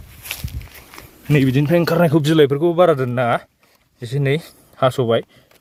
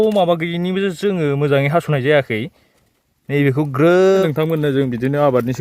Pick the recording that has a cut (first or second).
second